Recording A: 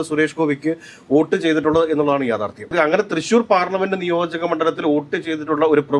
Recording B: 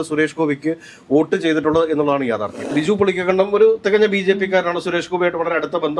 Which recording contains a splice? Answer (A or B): B